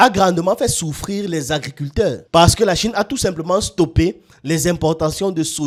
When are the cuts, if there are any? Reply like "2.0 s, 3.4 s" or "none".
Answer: none